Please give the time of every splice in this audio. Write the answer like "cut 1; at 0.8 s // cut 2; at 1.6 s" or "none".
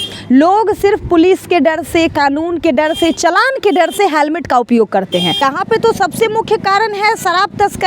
cut 1; at 5.4 s